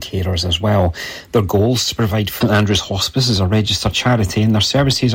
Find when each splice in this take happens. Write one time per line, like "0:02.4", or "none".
0:02.3

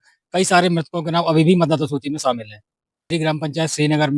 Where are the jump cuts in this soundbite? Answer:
0:03.1

